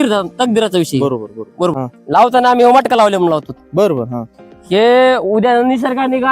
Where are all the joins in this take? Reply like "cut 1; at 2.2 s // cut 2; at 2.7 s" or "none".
cut 1; at 1.7 s